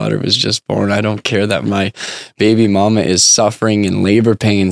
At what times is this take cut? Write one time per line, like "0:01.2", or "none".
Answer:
0:01.6